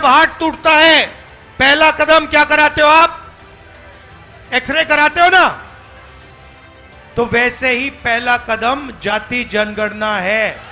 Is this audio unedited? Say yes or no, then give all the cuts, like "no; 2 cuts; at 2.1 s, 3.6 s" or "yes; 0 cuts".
yes; 0 cuts